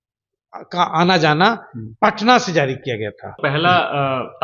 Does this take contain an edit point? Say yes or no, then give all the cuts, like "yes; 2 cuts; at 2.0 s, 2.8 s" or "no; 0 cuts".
yes; 1 cut; at 3.4 s